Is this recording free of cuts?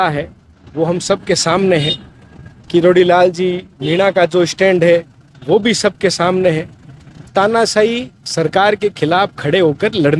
no; 1 cut; at 7.3 s

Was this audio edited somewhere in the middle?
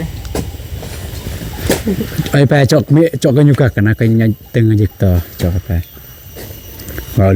no; 0 cuts

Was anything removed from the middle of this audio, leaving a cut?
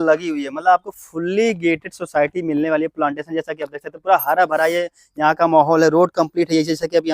no; 0 cuts

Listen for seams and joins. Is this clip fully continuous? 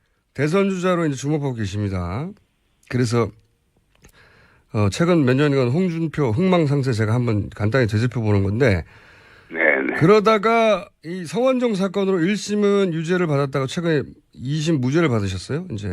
no; 1 cut; at 5.5 s

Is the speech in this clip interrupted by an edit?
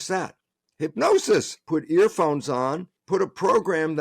yes; 2 cuts; at 1.6 s, 2.9 s

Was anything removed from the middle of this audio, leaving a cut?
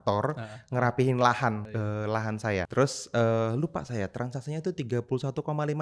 yes; 2 cuts; at 1.6 s, 2.7 s

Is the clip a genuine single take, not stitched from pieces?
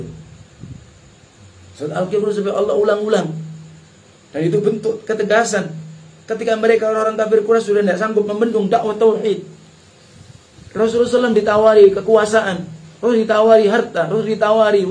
yes; 0 cuts

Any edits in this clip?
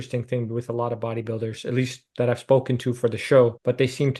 no; 0 cuts

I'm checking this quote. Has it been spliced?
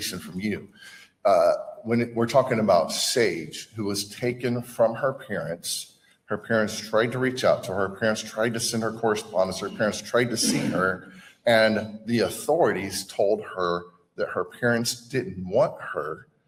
no; 0 cuts

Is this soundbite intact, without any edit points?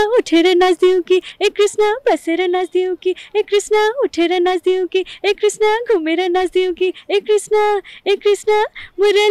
yes; 0 cuts

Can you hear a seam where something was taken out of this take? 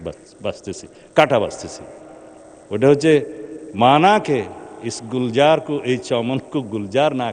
no; 0 cuts

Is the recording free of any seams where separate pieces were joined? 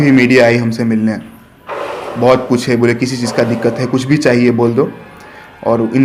yes; 0 cuts

